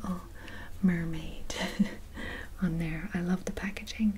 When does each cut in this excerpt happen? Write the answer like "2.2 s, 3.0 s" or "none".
none